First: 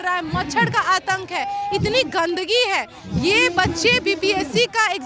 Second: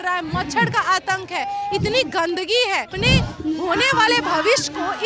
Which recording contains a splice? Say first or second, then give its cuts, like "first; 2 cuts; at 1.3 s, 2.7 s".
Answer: second; 1 cut; at 2.9 s